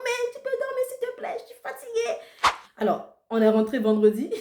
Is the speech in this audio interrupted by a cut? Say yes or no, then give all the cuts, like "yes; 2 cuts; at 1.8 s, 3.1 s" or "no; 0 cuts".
yes; 1 cut; at 2.6 s